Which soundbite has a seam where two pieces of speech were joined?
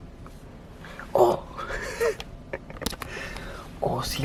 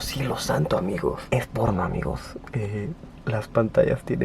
second; 1 cut; at 1.2 s

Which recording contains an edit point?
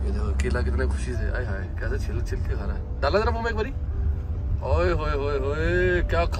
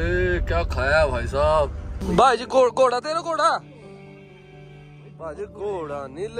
second; 1 cut; at 1.9 s

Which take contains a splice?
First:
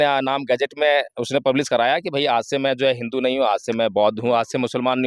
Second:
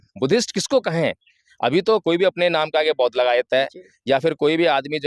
second; 1 cut; at 2.0 s

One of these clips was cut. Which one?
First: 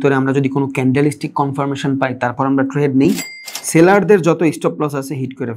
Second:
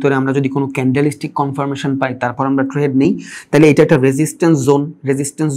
first; 1 cut; at 3.3 s

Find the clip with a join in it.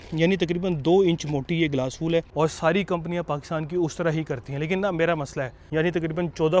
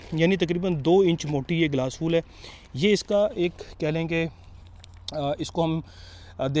first; 2 cuts; at 2.3 s, 5.6 s

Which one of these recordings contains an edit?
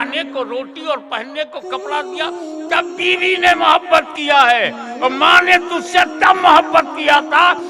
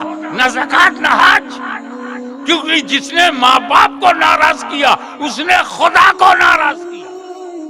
second; 1 cut; at 6.7 s

